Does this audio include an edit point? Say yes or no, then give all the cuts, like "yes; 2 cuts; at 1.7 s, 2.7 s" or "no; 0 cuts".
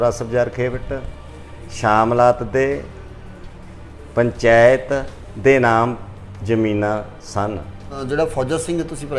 yes; 1 cut; at 7.9 s